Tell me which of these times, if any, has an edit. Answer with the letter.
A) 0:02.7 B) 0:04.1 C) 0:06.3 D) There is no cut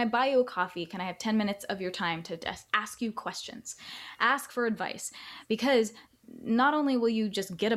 C